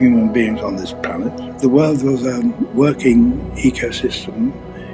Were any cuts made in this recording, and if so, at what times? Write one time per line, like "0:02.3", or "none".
0:01.5
0:02.7